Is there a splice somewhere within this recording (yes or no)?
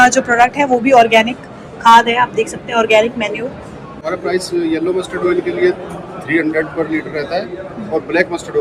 yes